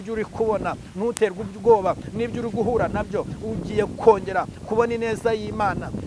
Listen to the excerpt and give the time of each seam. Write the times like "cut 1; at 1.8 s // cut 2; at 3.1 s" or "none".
none